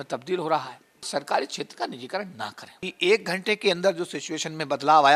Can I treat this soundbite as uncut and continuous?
no; 2 cuts; at 1.0 s, 2.9 s

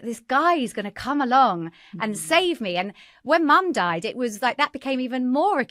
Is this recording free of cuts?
yes; 0 cuts

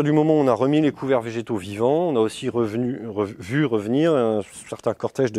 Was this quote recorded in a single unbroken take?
yes; 0 cuts

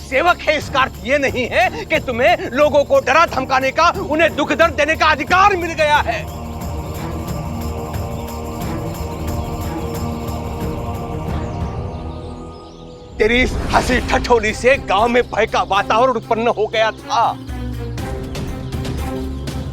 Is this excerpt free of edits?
yes; 0 cuts

